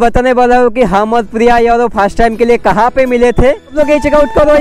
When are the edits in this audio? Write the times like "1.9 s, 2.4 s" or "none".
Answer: 3.7 s

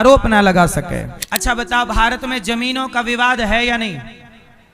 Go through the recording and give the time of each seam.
1.2 s

